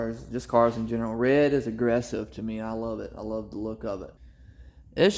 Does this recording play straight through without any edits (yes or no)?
no